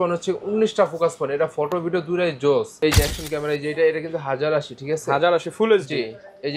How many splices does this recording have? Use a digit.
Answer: 1